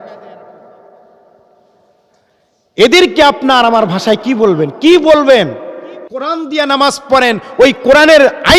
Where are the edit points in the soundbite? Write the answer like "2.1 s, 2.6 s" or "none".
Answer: 6.1 s